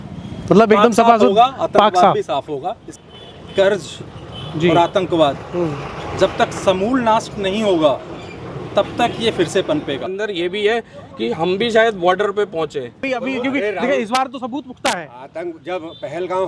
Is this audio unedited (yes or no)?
no